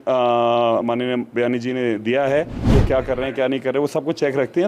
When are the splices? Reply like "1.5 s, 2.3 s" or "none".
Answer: 2.6 s